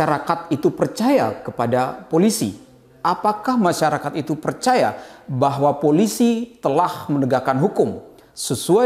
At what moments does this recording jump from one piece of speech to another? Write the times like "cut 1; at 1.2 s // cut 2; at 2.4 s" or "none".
none